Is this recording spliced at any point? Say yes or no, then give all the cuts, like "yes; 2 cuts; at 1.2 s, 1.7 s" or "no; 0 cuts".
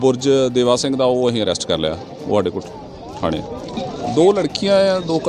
yes; 1 cut; at 3.8 s